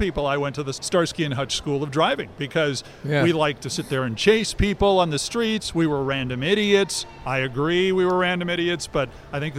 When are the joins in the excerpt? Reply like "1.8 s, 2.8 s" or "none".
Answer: none